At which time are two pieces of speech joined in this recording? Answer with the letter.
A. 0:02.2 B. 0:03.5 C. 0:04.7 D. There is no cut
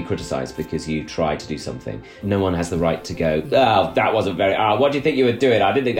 A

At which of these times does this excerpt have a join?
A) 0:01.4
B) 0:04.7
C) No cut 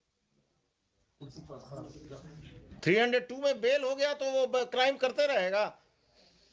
C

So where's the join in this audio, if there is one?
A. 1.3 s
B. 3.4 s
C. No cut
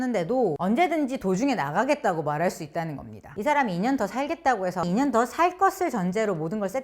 B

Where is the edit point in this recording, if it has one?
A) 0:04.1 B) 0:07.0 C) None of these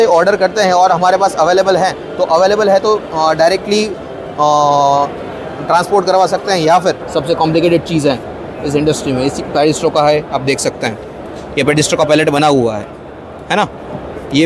B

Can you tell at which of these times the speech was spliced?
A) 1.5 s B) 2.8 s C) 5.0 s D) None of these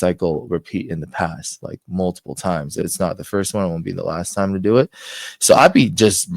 B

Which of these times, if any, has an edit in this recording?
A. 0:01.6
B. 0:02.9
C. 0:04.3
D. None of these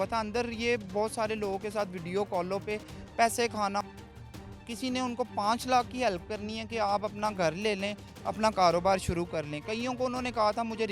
C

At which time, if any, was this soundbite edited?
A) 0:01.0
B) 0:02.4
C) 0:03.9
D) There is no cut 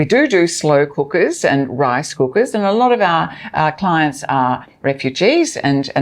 D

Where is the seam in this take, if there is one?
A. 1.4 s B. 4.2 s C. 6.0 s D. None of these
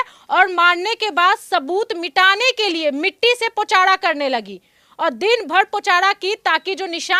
D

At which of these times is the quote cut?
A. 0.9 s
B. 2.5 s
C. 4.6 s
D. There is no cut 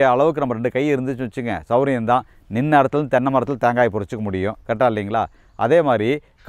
D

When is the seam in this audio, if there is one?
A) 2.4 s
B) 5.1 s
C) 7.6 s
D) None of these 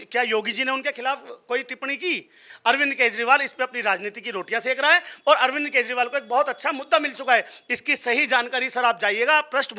A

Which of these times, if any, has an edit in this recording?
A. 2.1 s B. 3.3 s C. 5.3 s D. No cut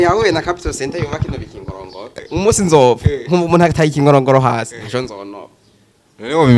A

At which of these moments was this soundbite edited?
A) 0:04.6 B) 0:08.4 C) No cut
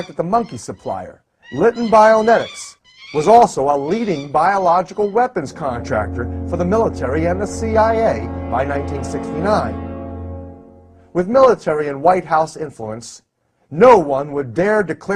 A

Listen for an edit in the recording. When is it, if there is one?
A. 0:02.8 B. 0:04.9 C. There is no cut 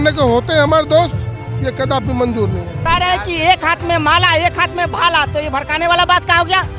A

